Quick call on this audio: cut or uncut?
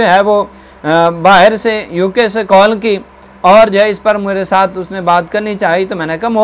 uncut